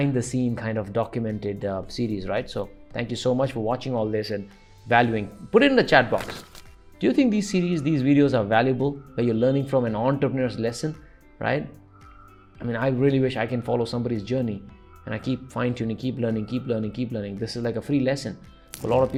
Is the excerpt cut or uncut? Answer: uncut